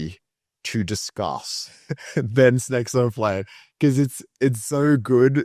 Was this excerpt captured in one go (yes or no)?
yes